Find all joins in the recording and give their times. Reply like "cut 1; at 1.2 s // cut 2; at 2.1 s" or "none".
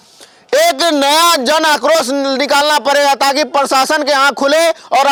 none